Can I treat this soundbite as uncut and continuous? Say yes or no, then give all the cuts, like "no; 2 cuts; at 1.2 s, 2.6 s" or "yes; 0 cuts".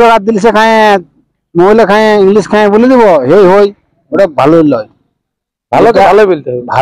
yes; 0 cuts